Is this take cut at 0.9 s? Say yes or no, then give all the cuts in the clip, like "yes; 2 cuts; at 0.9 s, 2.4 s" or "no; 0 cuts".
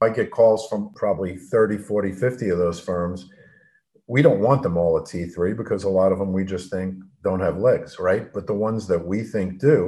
yes; 1 cut; at 0.9 s